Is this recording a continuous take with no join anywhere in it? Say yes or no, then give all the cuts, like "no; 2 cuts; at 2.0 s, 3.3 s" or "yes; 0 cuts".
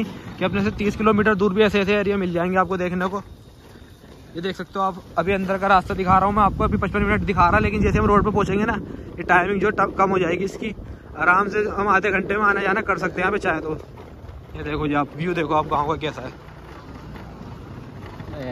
yes; 0 cuts